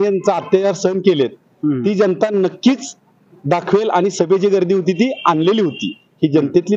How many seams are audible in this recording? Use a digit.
0